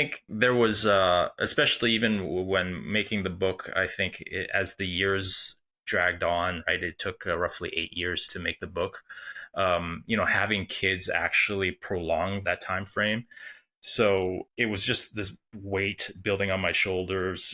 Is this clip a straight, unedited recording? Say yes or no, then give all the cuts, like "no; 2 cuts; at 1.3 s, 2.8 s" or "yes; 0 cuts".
no; 3 cuts; at 8.3 s, 12.4 s, 14.4 s